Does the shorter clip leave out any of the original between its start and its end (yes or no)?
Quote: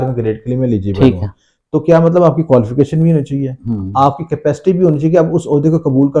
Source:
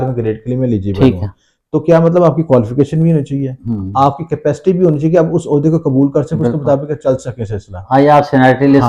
no